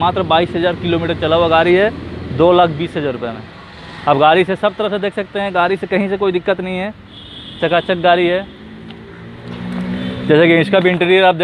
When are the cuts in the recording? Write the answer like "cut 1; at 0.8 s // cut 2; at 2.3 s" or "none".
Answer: none